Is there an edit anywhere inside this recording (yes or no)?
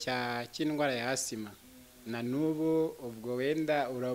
no